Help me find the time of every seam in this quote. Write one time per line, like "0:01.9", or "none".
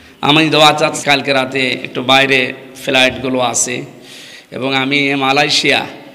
0:01.0

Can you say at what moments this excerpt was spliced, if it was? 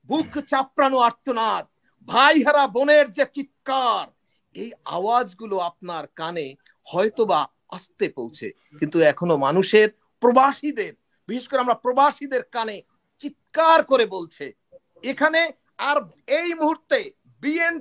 none

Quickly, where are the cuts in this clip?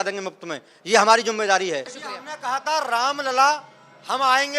0:02.0

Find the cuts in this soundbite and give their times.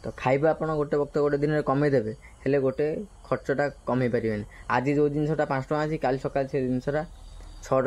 none

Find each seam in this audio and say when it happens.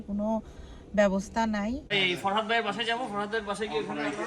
0:01.9

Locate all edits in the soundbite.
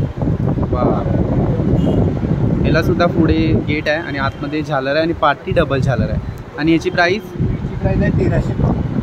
none

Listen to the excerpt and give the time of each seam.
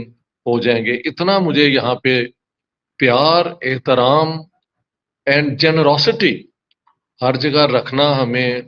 none

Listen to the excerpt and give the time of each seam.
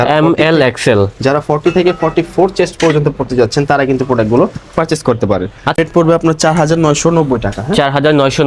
none

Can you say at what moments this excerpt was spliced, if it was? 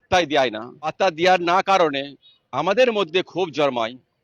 0:00.9

